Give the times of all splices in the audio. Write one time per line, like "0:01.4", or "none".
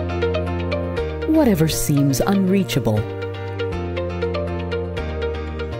none